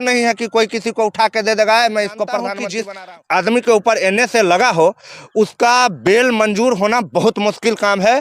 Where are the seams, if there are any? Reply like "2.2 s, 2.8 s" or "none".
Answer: 2.6 s